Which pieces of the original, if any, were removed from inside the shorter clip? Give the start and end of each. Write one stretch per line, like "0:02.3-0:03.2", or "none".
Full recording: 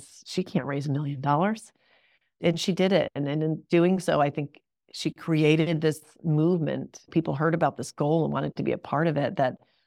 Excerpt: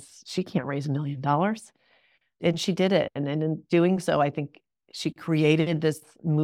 none

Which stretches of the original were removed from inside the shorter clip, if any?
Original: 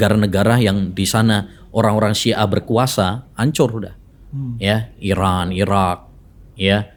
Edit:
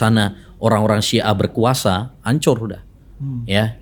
none

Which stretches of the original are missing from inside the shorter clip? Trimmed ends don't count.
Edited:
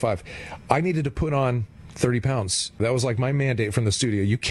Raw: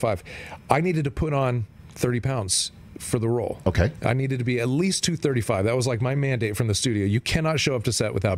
0:02.8-0:05.6

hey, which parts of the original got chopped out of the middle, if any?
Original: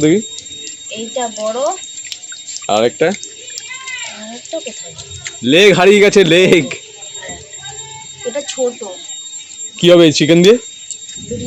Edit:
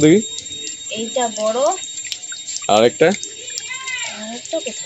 none

